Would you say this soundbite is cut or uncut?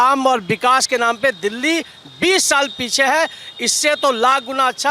uncut